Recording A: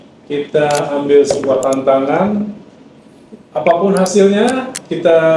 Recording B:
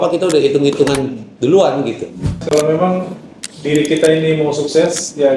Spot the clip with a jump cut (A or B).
B